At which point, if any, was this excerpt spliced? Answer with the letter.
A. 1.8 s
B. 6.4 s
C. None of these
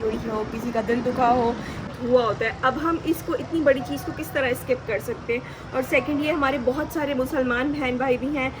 A